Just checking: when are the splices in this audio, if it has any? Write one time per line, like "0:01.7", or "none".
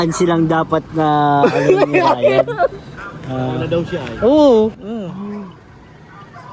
0:04.8